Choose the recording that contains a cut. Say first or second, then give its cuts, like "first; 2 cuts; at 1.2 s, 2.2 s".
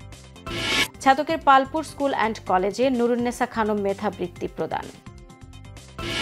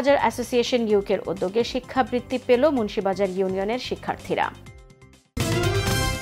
second; 1 cut; at 5.3 s